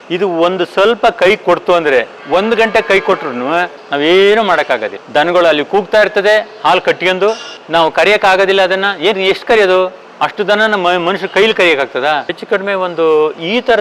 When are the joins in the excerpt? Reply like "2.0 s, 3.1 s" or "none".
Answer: 3.8 s, 12.3 s